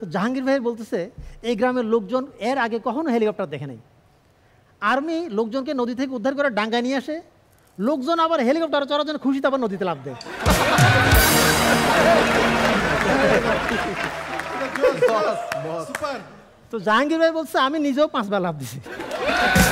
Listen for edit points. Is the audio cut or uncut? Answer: uncut